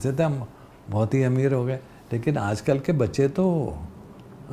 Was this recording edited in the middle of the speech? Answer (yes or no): no